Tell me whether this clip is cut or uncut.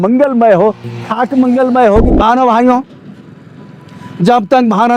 cut